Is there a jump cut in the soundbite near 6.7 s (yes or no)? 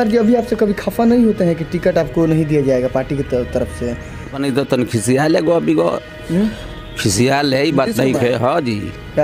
no